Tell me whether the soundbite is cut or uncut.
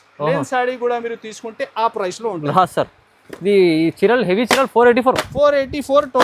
uncut